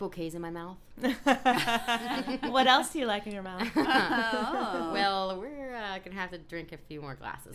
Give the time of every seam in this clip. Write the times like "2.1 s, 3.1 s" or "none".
2.0 s

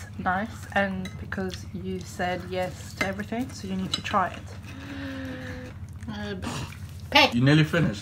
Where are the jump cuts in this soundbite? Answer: 5.7 s, 7.3 s

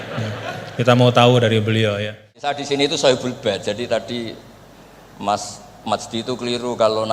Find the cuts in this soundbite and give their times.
2.4 s

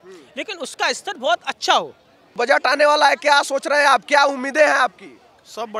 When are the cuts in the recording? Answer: 2.3 s

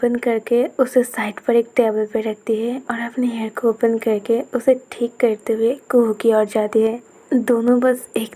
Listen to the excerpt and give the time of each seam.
7.1 s

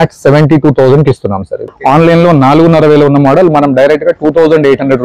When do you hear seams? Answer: 1.7 s

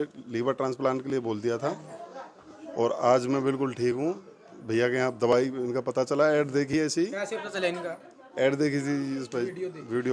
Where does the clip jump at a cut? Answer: none

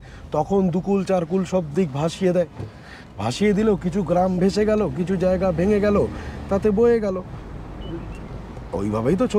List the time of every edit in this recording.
none

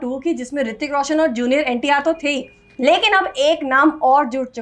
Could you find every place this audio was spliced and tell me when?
none

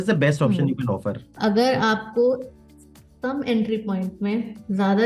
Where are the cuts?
1.3 s

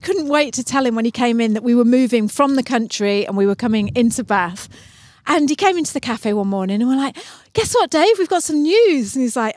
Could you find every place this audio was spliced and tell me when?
none

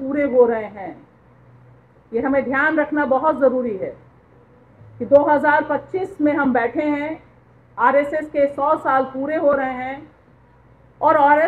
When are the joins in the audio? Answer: none

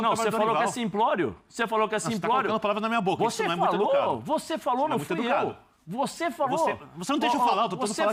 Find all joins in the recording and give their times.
none

